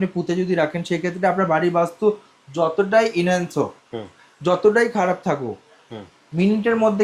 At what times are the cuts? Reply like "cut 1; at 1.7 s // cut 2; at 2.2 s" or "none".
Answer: none